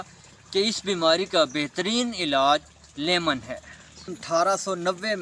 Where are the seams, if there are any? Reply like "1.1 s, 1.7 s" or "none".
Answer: 4.1 s